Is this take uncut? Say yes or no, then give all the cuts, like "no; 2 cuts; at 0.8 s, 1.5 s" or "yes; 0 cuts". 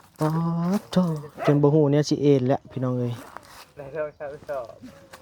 yes; 0 cuts